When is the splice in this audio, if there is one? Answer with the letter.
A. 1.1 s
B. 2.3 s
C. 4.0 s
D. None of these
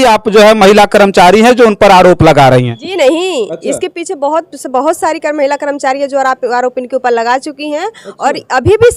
D